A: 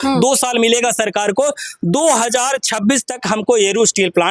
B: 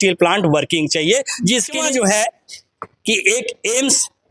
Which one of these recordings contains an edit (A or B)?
B